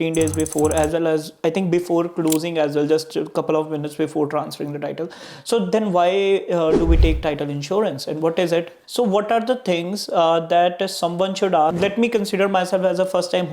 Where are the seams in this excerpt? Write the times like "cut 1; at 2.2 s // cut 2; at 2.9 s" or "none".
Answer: cut 1; at 8.8 s // cut 2; at 11.7 s